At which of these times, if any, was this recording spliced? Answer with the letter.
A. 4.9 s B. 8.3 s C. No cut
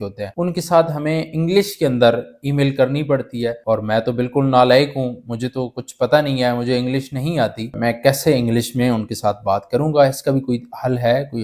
C